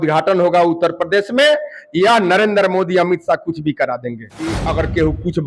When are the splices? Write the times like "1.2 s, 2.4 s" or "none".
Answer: 4.6 s

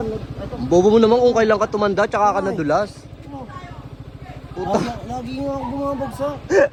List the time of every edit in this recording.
none

